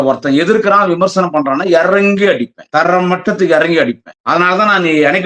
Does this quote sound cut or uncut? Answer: cut